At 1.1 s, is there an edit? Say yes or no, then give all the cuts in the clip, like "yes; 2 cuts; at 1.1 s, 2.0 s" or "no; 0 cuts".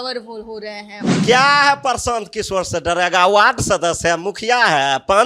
yes; 1 cut; at 1.1 s